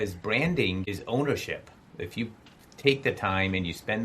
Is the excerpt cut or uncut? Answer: cut